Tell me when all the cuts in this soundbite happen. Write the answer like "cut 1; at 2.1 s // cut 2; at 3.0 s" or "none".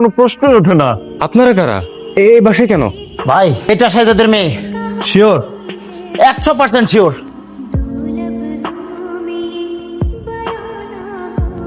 cut 1; at 7.3 s

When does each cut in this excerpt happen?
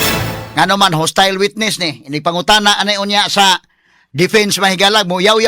none

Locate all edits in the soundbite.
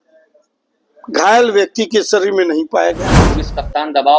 cut 1; at 3.2 s

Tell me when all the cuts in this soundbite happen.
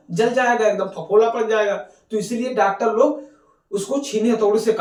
none

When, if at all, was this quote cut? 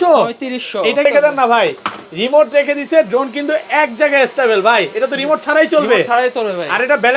cut 1; at 1.1 s

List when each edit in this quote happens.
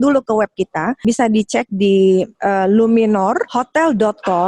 cut 1; at 1.0 s // cut 2; at 2.3 s // cut 3; at 3.5 s

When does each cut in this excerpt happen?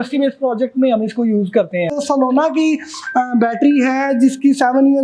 cut 1; at 1.9 s

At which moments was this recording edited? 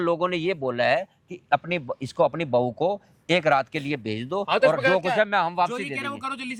none

